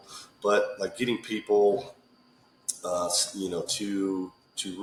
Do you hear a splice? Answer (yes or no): no